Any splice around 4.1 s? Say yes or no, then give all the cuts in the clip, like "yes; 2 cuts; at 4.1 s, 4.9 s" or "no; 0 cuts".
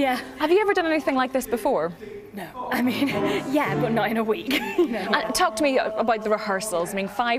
no; 1 cut; at 2.5 s